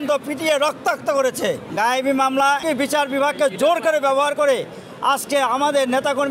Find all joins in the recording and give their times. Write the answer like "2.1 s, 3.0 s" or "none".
1.7 s, 2.6 s